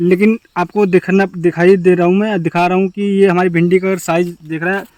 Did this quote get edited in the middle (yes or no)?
no